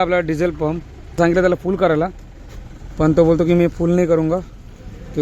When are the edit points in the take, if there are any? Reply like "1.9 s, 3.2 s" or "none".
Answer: 1.2 s